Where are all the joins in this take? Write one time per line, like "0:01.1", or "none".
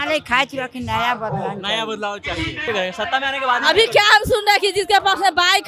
0:02.6